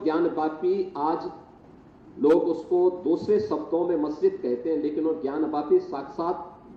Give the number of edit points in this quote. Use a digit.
0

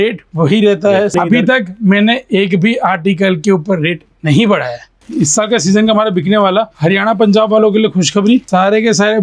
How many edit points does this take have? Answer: 4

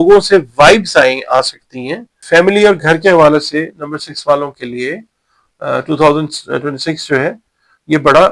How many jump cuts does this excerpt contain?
1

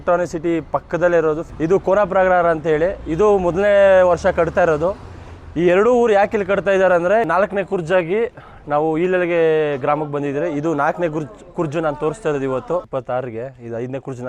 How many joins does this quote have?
3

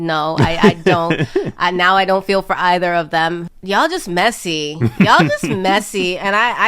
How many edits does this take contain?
1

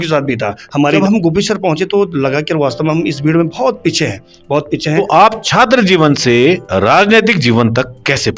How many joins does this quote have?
2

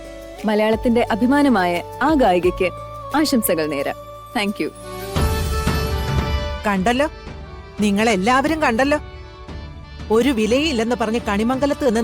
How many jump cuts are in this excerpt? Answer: 1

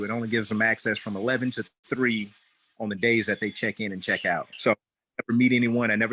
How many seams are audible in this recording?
1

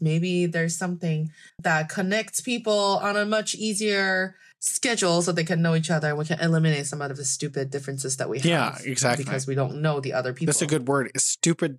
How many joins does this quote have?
1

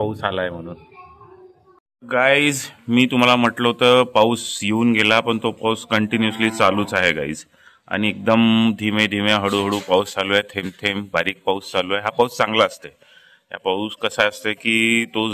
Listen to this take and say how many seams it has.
0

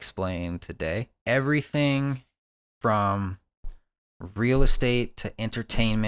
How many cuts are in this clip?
1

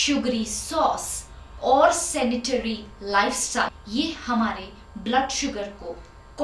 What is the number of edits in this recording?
1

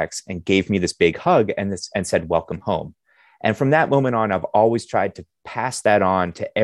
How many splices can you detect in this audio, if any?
0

